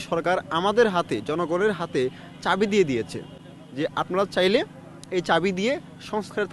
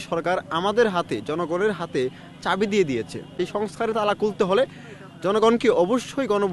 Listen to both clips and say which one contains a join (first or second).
second